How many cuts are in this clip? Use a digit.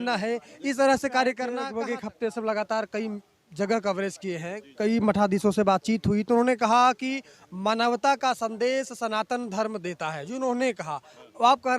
1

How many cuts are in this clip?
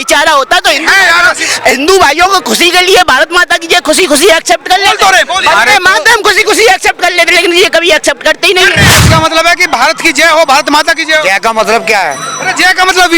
1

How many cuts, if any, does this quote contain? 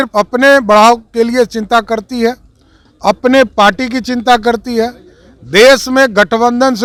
0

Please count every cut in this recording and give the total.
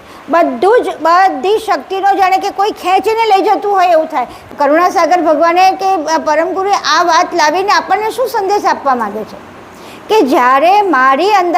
1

